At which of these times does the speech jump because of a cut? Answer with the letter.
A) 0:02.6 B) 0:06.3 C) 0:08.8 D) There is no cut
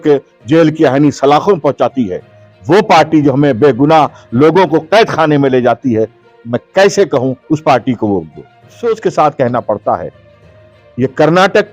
C